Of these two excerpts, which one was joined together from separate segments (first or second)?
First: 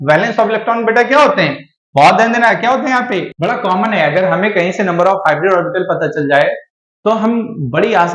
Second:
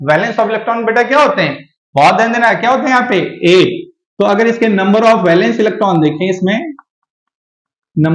first